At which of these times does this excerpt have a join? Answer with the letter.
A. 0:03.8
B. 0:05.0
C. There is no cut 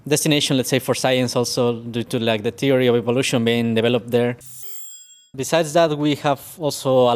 B